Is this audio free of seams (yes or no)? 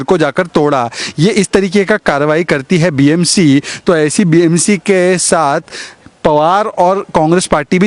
yes